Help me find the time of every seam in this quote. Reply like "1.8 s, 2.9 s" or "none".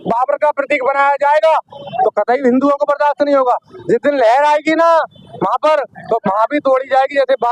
none